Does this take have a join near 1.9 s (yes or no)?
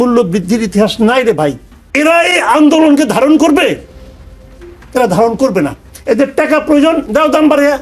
yes